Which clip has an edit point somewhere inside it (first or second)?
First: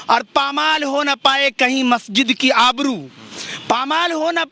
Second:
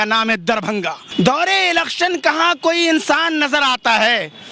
second